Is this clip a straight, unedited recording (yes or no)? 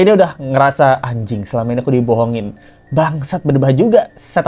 yes